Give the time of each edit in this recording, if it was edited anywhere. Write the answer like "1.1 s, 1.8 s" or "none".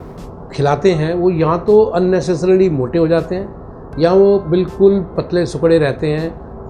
none